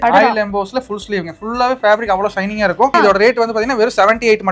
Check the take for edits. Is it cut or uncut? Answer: cut